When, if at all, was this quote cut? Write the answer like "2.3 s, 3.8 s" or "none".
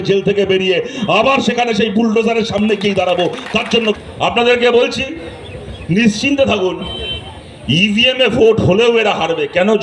3.9 s